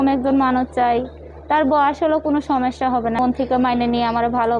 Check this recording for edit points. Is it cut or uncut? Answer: cut